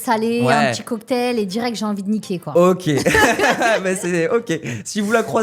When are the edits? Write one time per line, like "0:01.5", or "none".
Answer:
none